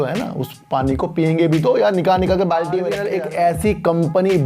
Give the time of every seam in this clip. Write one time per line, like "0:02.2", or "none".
0:03.0